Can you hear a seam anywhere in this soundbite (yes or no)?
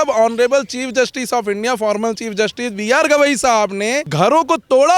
yes